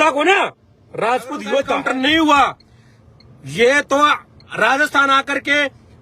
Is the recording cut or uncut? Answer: cut